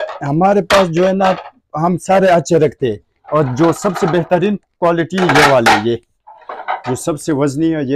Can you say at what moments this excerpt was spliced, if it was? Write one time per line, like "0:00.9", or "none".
none